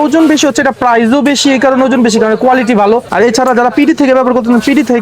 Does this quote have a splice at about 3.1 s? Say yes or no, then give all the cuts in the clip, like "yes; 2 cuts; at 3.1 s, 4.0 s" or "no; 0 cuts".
yes; 1 cut; at 3.1 s